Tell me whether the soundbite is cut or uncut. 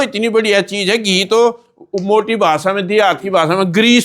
uncut